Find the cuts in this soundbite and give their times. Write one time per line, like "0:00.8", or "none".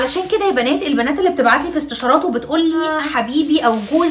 0:03.0